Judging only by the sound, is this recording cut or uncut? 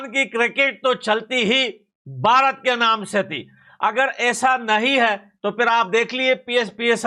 uncut